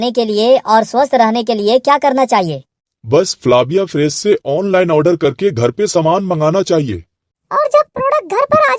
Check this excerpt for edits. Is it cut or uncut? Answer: uncut